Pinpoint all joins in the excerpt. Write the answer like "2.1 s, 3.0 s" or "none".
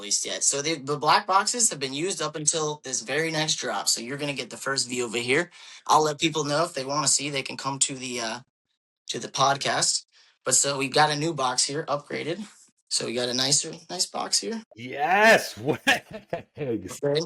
none